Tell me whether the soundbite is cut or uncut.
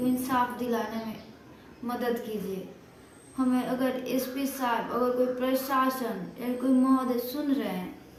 uncut